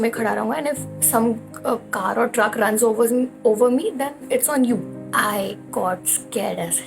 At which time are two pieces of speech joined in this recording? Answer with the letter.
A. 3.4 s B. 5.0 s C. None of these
B